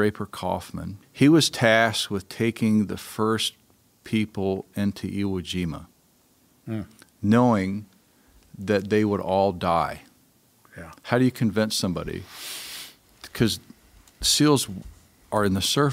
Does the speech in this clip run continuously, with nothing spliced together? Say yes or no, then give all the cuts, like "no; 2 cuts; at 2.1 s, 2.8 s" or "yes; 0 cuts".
no; 1 cut; at 1.0 s